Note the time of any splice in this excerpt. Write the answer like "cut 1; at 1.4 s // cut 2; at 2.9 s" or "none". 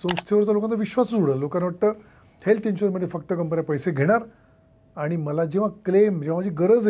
none